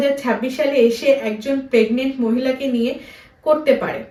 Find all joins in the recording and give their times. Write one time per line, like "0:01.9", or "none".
none